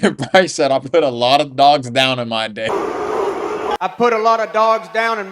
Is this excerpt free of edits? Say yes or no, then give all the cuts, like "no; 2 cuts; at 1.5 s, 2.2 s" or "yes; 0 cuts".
no; 1 cut; at 2.7 s